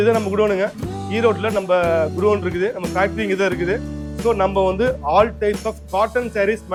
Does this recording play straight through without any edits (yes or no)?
yes